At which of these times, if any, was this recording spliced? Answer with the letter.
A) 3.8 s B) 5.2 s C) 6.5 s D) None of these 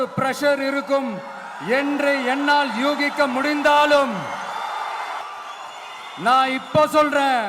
B